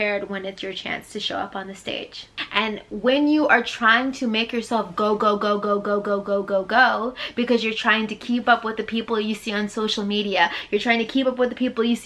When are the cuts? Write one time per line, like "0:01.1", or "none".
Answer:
0:02.4